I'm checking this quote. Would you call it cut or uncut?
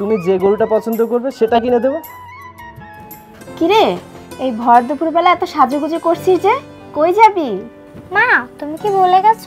cut